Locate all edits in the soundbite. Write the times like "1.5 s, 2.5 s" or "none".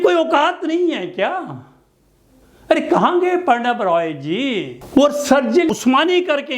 4.7 s, 5.7 s